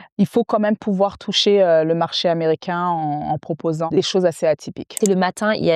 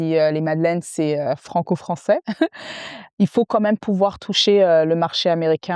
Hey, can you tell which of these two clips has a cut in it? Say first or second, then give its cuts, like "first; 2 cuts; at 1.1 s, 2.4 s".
first; 2 cuts; at 3.9 s, 5.0 s